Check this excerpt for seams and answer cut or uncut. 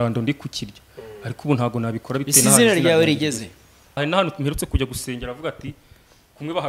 cut